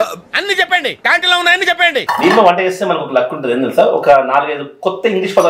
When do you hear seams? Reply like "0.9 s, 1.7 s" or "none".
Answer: 2.0 s